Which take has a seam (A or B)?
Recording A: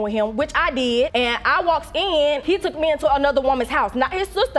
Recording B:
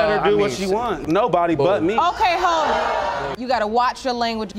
B